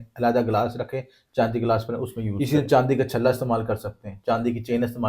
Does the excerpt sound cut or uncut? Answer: cut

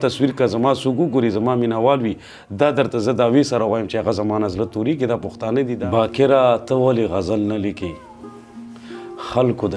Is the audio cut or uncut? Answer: cut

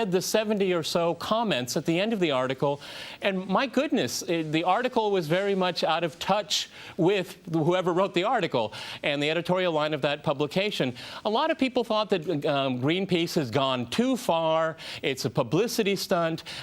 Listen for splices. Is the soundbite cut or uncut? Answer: cut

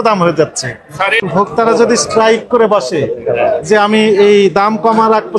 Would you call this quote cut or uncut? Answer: cut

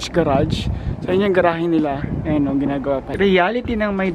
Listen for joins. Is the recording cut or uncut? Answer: cut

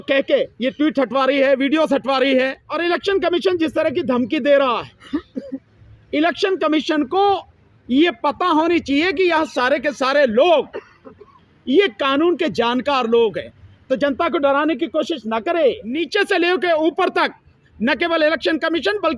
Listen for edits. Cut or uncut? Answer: cut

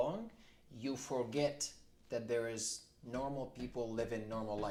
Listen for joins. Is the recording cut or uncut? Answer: uncut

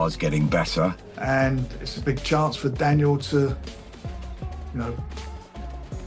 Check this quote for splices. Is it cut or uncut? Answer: cut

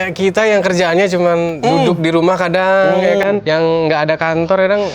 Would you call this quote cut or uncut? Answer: cut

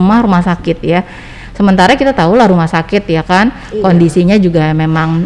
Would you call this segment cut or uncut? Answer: uncut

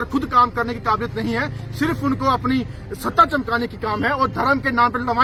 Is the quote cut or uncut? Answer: uncut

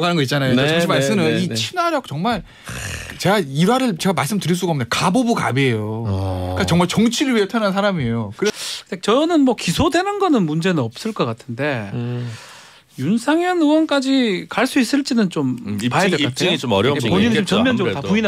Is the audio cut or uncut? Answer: cut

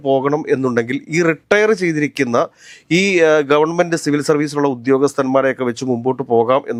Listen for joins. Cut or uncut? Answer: uncut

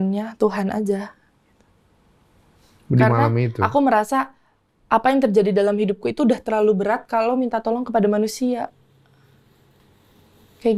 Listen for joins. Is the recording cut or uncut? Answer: uncut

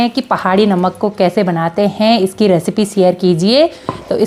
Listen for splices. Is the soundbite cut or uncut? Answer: uncut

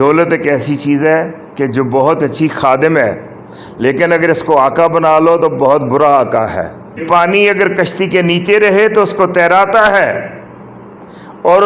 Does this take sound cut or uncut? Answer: cut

